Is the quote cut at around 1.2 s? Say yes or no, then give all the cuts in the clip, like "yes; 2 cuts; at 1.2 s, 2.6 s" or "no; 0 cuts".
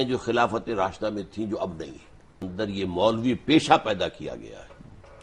no; 1 cut; at 2.5 s